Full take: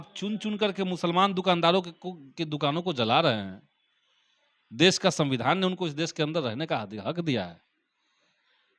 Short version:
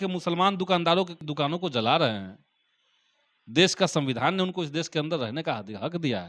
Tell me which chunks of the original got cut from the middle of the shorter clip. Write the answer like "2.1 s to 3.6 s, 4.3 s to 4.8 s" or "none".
2.0 s to 2.4 s